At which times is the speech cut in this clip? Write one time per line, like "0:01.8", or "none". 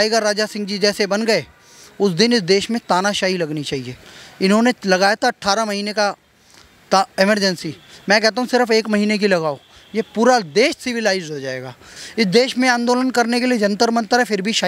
0:11.9